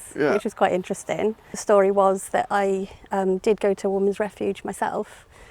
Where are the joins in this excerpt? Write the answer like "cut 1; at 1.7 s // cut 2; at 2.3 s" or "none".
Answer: cut 1; at 1.5 s